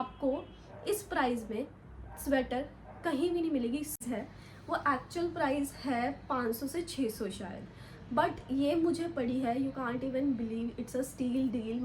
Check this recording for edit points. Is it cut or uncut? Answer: cut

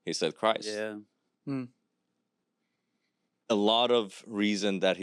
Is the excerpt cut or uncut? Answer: uncut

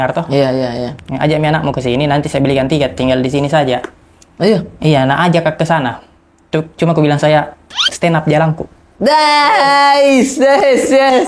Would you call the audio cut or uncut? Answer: uncut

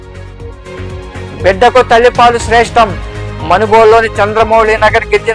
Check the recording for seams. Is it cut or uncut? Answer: cut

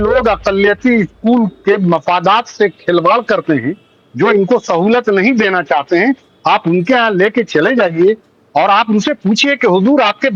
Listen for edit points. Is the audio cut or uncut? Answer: uncut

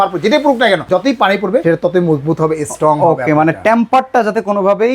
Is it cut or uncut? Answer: cut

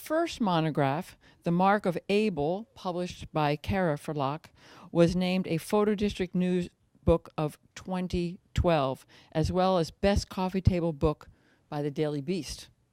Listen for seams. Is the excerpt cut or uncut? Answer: cut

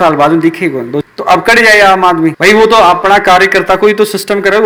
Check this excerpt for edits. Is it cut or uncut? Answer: uncut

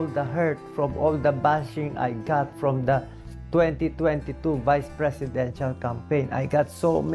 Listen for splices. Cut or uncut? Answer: uncut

